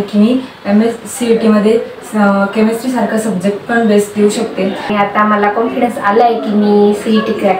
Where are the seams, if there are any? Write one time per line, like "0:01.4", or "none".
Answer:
0:04.9